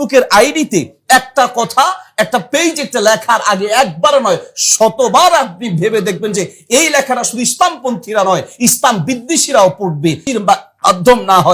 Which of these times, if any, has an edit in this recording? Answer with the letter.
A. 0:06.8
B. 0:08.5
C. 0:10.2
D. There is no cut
C